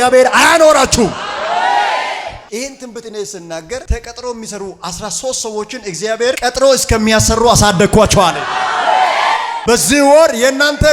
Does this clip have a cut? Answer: no; 0 cuts

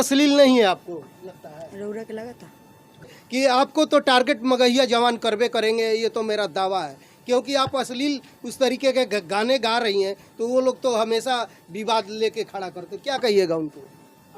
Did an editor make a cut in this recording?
yes; 1 cut; at 3.2 s

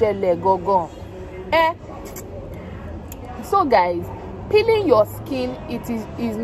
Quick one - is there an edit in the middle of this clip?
no; 0 cuts

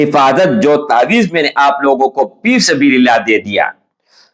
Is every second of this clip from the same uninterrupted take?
yes; 0 cuts

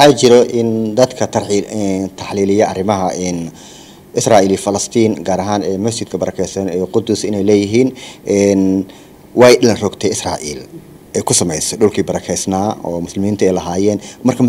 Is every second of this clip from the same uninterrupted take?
yes; 0 cuts

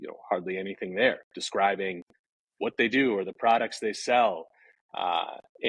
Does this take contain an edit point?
no; 0 cuts

